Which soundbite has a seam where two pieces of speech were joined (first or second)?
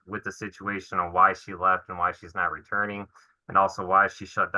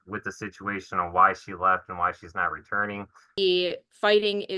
second